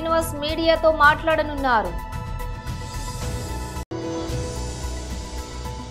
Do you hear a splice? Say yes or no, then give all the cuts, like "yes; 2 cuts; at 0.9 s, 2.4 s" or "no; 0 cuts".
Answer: no; 0 cuts